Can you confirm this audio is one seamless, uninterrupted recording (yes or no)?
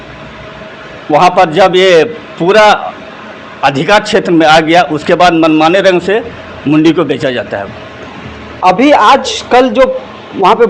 yes